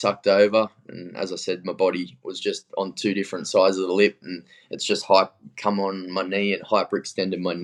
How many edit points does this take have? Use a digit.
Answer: 0